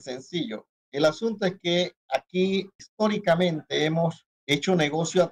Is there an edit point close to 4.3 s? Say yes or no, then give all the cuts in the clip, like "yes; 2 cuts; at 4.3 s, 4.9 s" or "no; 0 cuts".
yes; 2 cuts; at 2.8 s, 4.3 s